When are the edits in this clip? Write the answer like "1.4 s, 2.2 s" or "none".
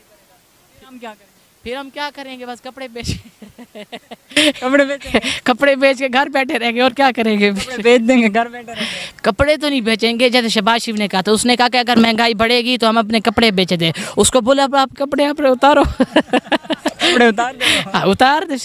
none